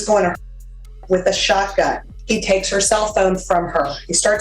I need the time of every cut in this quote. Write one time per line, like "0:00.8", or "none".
0:02.1